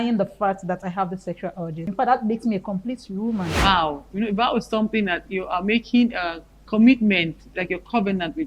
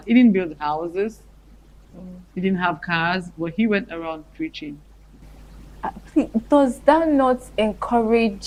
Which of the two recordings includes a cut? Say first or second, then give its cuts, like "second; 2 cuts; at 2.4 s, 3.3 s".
first; 2 cuts; at 1.9 s, 3.6 s